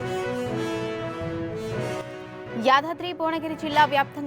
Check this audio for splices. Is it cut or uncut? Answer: cut